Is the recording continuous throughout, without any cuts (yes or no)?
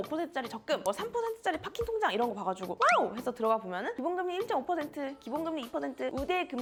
yes